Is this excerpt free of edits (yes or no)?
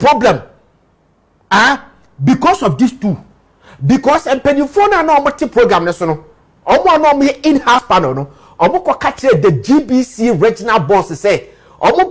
yes